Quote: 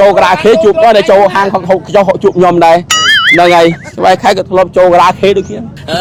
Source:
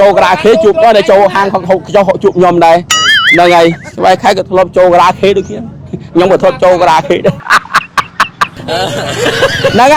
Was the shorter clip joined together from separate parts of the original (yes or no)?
no